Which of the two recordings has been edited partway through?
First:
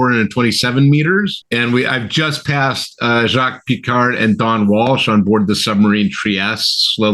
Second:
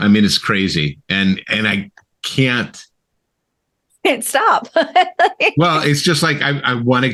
first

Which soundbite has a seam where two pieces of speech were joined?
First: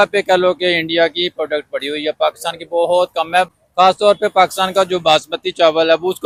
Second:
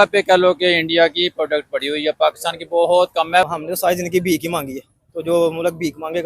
second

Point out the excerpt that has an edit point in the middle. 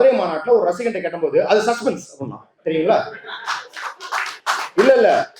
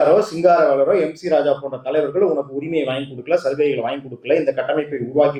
first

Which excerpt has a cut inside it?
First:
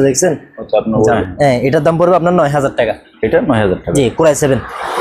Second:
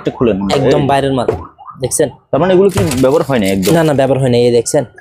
first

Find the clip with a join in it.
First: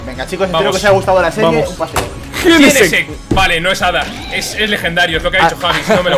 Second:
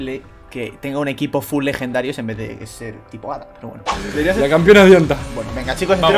second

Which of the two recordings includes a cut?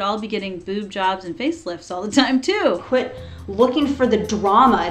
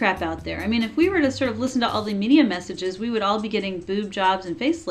first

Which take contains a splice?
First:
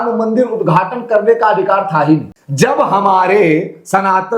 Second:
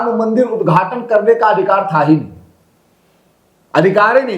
first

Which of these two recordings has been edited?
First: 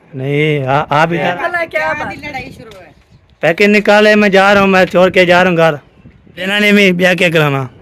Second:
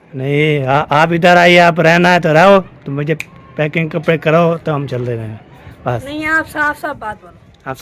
first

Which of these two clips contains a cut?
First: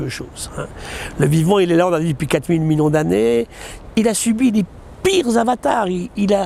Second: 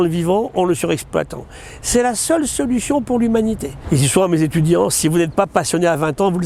second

